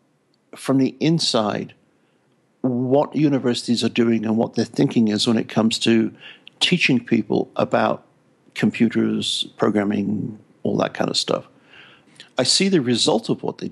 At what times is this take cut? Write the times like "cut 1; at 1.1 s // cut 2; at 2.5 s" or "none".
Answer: none